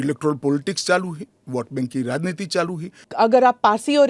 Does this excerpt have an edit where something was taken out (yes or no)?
yes